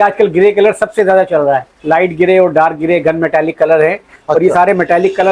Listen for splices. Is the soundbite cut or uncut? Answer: uncut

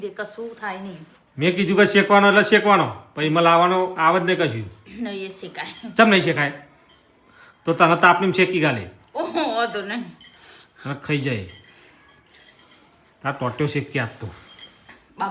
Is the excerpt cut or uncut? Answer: uncut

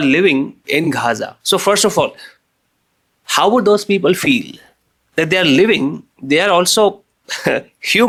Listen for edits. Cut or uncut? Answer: uncut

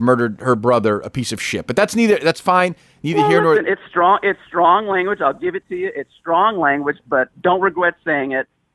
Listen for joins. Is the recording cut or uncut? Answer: uncut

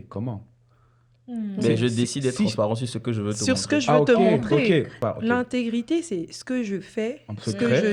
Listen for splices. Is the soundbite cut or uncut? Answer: cut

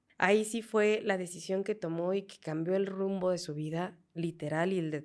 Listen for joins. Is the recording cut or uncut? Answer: uncut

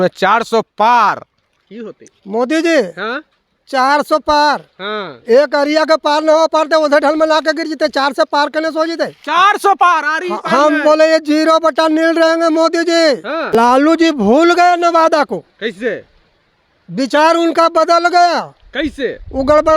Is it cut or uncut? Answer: cut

